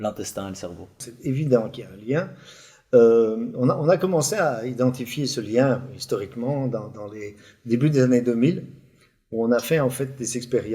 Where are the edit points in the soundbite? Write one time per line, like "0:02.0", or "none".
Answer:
0:01.1